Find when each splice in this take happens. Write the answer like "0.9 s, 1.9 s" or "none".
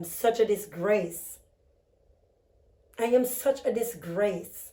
none

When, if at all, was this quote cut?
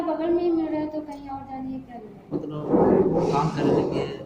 2.5 s

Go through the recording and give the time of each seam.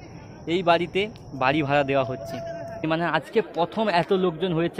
2.9 s

